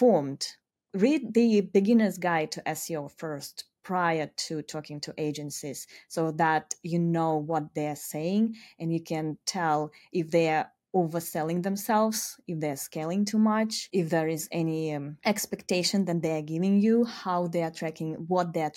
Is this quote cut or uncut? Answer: cut